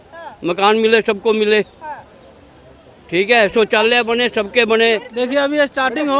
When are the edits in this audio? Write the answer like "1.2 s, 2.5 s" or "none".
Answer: 5.1 s